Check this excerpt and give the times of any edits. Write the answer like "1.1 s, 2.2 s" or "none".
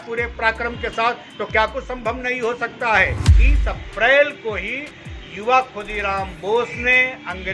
3.4 s

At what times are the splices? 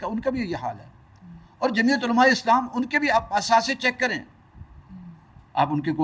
none

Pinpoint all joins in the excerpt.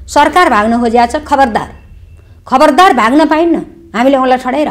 none

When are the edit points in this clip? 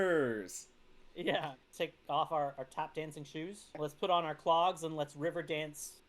1.6 s, 3.8 s

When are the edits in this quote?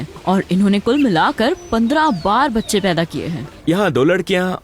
3.5 s

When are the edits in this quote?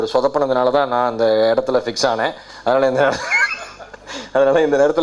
none

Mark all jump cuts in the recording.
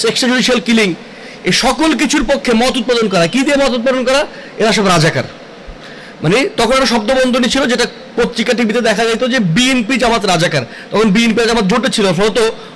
none

